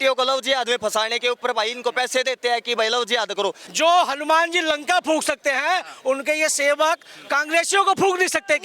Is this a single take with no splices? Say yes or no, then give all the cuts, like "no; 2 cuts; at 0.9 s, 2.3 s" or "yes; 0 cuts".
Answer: no; 1 cut; at 3.6 s